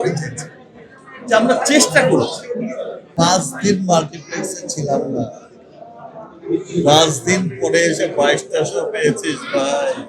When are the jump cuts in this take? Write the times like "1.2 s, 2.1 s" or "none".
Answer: 3.2 s

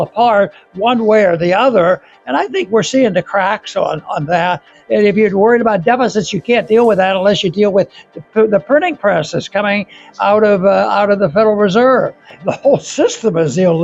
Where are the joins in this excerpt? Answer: 4.7 s, 12.4 s

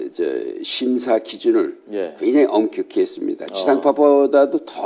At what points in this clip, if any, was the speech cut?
1.4 s

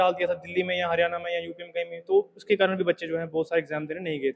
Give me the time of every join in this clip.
none

